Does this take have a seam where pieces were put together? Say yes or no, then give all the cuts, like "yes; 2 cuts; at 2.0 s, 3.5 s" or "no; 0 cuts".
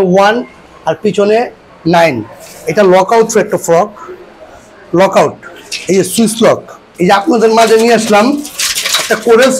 yes; 1 cut; at 6.9 s